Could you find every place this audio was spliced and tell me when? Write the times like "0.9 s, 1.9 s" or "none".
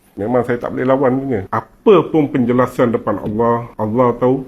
1.5 s